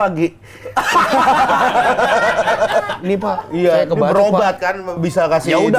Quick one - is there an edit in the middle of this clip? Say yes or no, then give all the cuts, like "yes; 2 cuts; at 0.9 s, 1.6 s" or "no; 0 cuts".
yes; 1 cut; at 3.0 s